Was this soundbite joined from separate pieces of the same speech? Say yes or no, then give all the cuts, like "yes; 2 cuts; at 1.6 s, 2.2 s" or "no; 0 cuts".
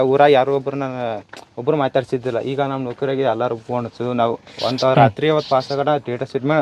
no; 0 cuts